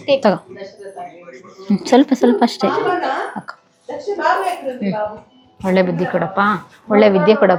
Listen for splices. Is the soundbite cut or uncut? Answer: uncut